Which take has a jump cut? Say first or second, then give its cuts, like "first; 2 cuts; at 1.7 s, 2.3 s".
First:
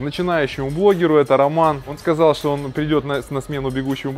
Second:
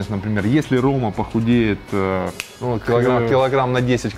first; 1 cut; at 1.9 s